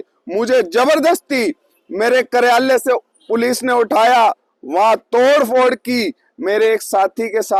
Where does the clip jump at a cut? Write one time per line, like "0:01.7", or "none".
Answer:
none